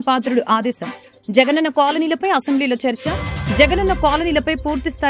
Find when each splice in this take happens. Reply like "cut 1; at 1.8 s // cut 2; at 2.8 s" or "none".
none